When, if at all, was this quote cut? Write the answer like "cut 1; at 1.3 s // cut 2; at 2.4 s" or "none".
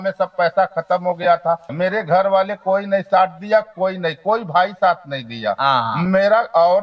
cut 1; at 1.7 s